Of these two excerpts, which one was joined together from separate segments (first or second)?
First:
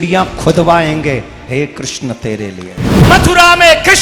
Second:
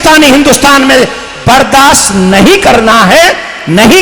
first